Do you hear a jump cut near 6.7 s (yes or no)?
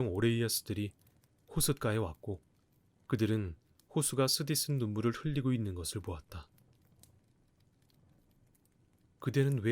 yes